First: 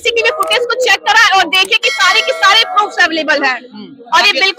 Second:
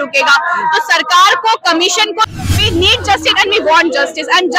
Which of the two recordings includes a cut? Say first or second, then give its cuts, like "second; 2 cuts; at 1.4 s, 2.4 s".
second; 1 cut; at 2.3 s